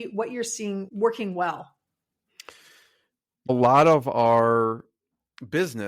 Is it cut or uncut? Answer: cut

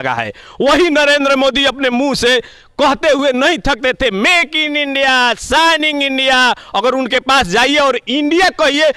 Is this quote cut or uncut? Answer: uncut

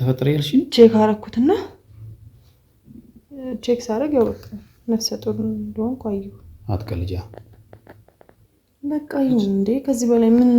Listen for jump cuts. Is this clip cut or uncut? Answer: cut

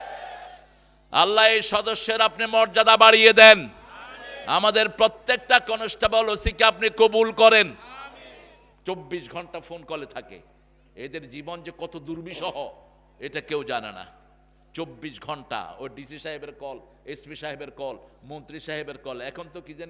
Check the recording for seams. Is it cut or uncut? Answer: uncut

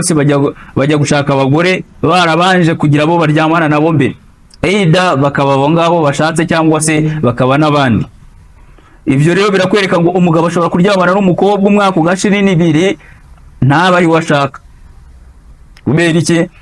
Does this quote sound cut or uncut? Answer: uncut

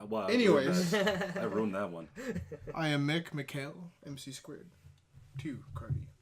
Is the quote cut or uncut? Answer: cut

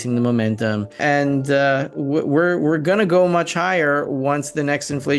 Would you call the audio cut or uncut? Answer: cut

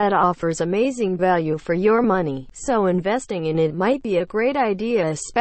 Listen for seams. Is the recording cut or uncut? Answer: cut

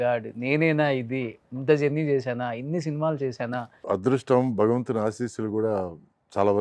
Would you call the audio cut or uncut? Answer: cut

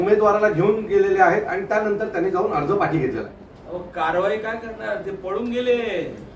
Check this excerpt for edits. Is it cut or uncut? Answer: cut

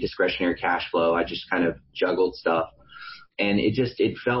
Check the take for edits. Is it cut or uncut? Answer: uncut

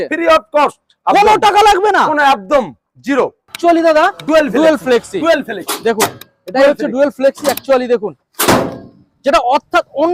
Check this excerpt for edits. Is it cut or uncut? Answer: cut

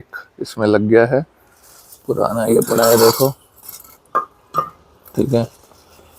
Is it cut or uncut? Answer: uncut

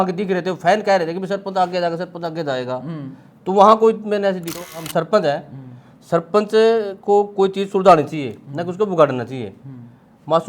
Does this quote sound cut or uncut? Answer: cut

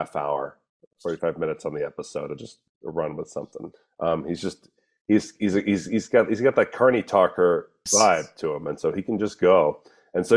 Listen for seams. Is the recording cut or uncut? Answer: cut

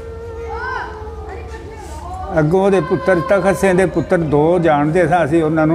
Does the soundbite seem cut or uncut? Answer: uncut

